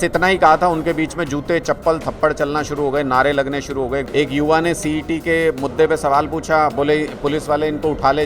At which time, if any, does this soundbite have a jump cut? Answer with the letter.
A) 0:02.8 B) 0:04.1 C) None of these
B